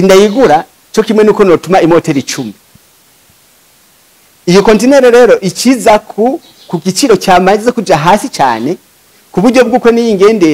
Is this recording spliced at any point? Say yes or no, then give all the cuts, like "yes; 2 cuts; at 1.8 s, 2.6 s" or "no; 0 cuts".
no; 0 cuts